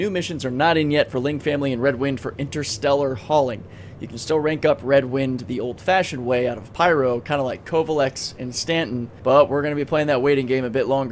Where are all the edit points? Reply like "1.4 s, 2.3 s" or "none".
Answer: 9.1 s